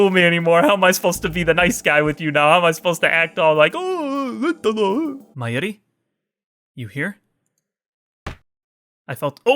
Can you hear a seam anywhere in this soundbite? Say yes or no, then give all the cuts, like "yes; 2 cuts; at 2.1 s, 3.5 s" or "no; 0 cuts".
yes; 1 cut; at 5.3 s